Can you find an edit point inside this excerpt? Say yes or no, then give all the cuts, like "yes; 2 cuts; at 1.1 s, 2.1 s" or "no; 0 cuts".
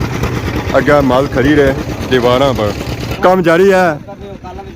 yes; 1 cut; at 3.0 s